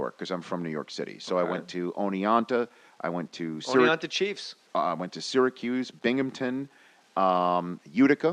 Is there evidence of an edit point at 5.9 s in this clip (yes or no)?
no